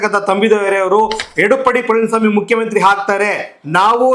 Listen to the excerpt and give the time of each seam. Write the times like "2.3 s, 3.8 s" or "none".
none